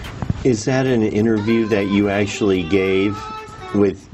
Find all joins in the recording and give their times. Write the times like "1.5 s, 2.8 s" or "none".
none